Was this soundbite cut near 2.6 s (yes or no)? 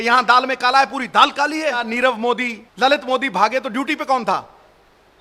yes